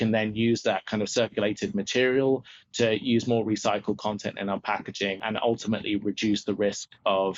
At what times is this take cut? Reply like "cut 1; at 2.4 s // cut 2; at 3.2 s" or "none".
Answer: cut 1; at 5.2 s